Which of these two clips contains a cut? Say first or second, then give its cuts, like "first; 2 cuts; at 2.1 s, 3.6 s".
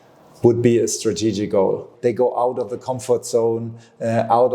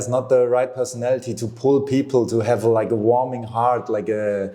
first; 1 cut; at 1.9 s